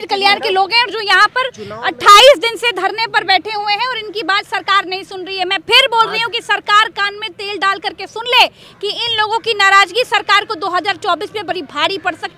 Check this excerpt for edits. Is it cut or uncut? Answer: uncut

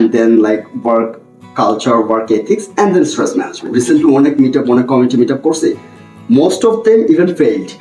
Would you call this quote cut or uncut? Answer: cut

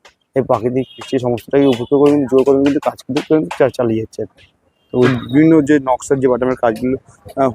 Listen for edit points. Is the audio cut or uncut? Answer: cut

